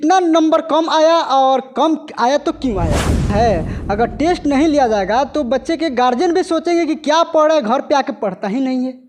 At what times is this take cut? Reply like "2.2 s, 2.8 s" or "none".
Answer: 3.3 s